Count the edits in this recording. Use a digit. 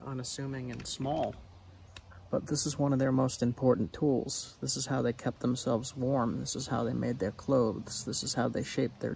0